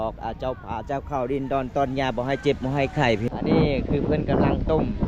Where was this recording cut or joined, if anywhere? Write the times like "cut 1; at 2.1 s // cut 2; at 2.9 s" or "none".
cut 1; at 3.2 s